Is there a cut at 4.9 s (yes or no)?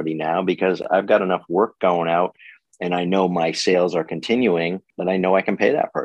yes